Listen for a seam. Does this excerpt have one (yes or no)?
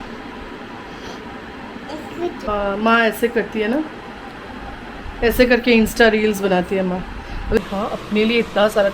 yes